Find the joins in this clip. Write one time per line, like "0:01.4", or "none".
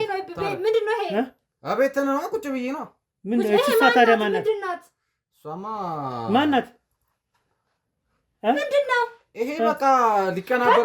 none